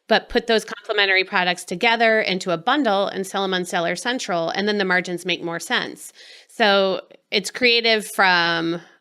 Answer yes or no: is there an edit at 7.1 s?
yes